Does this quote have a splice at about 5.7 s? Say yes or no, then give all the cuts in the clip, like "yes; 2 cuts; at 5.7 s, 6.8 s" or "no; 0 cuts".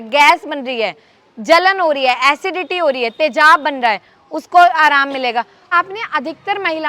yes; 1 cut; at 5.7 s